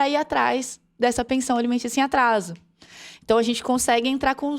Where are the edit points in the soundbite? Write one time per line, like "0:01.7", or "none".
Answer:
none